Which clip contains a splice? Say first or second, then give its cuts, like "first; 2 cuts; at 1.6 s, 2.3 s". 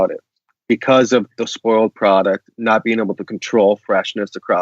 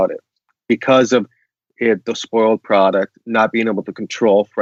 first; 1 cut; at 1.5 s